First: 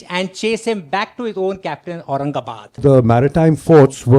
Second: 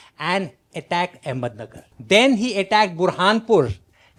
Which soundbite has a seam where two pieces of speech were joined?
first; 1 cut; at 2.8 s

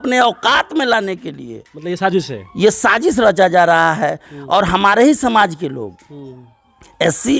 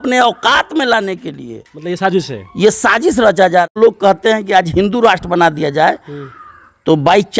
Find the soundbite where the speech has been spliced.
second; 1 cut; at 3.8 s

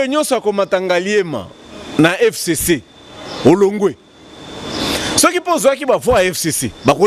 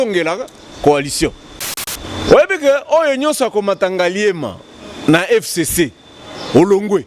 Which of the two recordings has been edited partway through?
second; 1 cut; at 1.8 s

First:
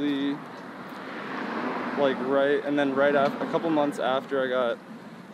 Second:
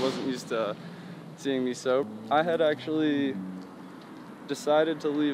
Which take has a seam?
second; 1 cut; at 2.0 s

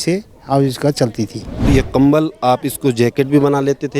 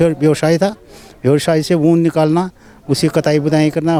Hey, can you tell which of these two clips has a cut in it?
first; 1 cut; at 1.6 s

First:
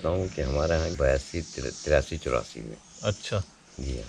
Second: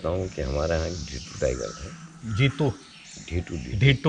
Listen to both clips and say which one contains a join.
first; 1 cut; at 0.9 s

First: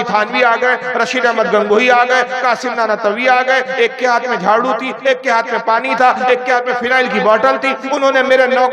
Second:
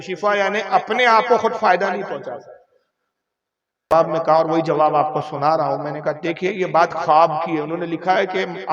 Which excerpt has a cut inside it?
second; 1 cut; at 3.9 s

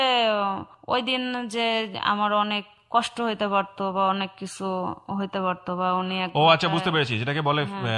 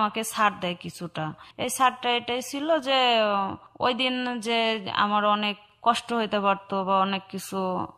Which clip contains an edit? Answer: second; 1 cut; at 1.5 s

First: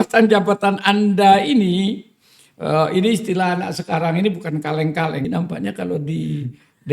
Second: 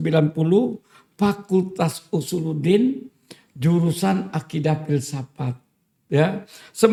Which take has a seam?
first; 1 cut; at 5.2 s

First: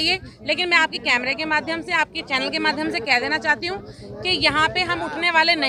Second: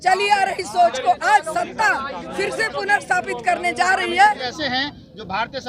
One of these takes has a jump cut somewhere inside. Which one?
second; 1 cut; at 4.4 s

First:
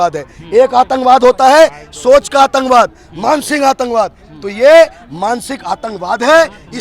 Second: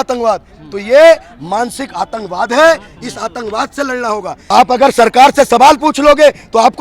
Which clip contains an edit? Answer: second; 1 cut; at 4.3 s

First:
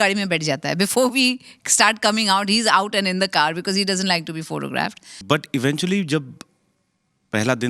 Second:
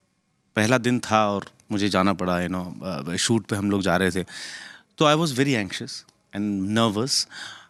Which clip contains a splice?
first; 1 cut; at 5.1 s

